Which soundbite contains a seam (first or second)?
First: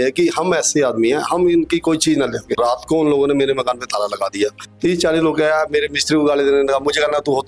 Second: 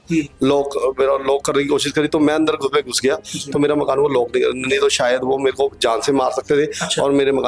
first